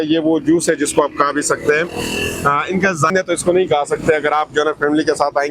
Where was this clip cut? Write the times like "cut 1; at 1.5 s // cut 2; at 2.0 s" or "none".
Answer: cut 1; at 3.1 s